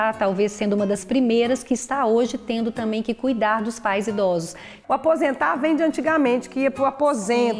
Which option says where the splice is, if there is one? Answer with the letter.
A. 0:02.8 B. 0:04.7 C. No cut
B